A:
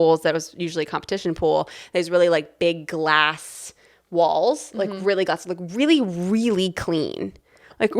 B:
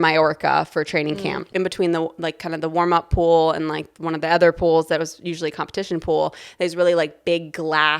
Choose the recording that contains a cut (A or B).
B